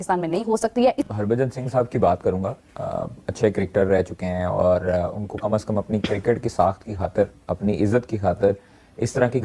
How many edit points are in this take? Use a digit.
1